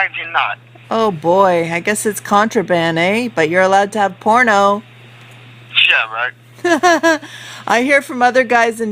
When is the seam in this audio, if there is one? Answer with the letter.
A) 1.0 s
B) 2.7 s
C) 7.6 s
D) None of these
A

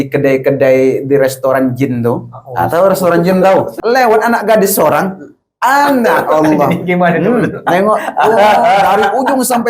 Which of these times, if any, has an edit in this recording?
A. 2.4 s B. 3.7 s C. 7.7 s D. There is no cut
B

